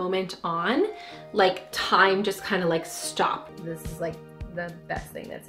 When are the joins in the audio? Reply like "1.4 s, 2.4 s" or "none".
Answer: 3.5 s